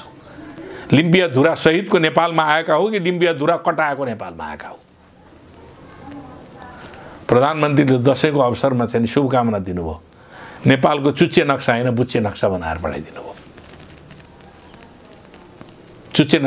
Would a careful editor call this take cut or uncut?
uncut